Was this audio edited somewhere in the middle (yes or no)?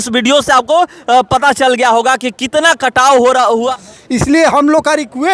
yes